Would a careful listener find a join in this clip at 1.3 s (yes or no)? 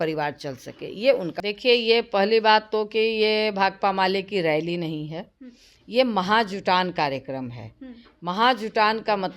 yes